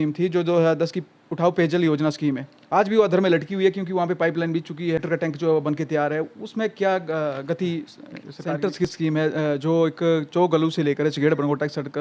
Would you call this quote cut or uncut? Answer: cut